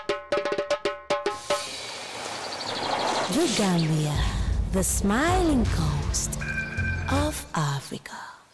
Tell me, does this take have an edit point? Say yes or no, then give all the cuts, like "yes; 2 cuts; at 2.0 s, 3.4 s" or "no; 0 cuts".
yes; 1 cut; at 0.9 s